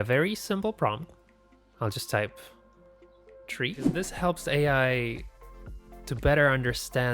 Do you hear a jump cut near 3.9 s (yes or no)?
yes